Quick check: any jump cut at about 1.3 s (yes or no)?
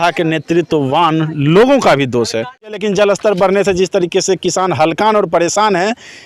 no